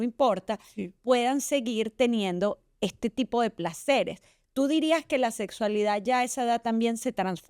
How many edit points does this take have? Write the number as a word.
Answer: zero